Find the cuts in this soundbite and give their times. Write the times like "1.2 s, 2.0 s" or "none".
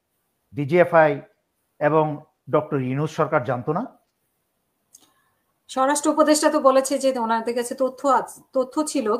none